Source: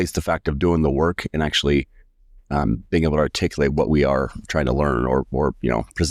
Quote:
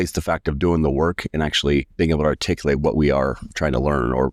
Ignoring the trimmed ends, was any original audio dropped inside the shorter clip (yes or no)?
yes